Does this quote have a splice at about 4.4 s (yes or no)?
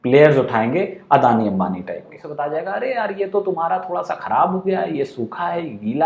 no